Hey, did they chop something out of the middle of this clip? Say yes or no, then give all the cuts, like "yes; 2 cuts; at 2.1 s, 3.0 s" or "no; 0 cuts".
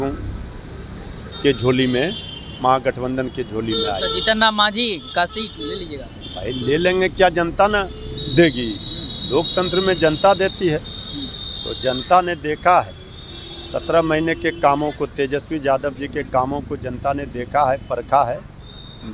no; 0 cuts